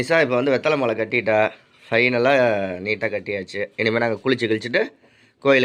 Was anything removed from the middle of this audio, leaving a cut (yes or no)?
no